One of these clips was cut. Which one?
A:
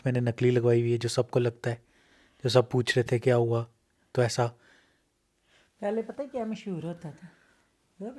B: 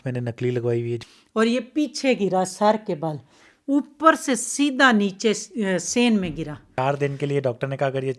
B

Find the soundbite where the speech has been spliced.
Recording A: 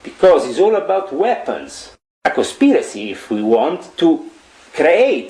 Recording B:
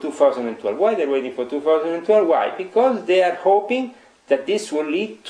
A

